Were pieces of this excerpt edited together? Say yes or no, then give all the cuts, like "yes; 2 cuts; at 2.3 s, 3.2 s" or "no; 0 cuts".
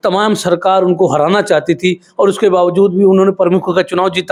no; 0 cuts